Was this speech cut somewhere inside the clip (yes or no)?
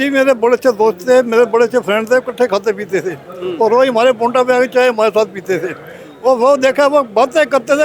no